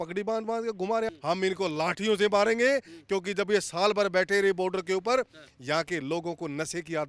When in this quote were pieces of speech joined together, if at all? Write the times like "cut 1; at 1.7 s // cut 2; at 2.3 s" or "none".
cut 1; at 1.1 s